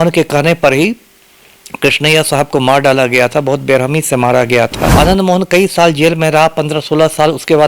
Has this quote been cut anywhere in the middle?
yes; 1 cut; at 4.8 s

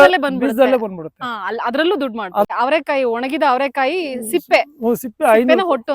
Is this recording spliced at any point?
yes; 1 cut; at 2.5 s

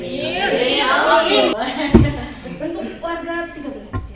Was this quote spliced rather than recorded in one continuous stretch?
yes; 1 cut; at 1.5 s

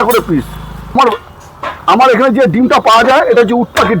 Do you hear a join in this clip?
yes; 1 cut; at 0.9 s

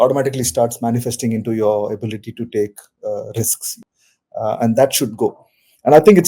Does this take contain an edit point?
yes; 1 cut; at 3.7 s

